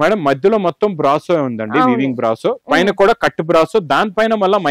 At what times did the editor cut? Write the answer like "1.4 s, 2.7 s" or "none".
none

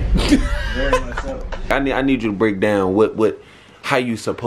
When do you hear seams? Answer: 1.7 s

